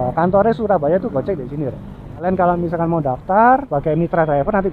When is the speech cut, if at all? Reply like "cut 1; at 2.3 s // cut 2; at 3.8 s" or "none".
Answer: cut 1; at 2.2 s // cut 2; at 3.7 s